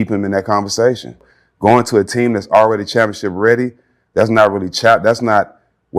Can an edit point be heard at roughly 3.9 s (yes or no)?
no